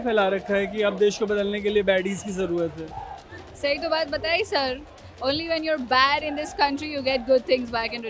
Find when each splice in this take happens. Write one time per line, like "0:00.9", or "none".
none